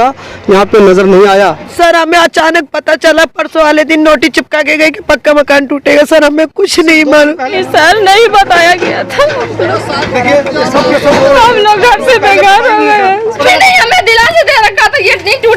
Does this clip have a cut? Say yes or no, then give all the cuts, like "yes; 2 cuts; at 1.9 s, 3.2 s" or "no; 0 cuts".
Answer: yes; 3 cuts; at 1.7 s, 7.6 s, 13.4 s